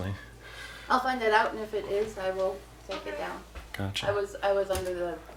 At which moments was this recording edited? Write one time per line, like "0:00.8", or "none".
none